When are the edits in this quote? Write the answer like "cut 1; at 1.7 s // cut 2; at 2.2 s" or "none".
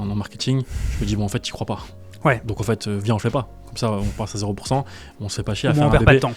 none